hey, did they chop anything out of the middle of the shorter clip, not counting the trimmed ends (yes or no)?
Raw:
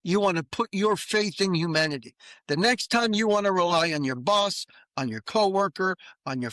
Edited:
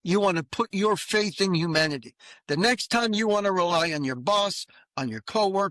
no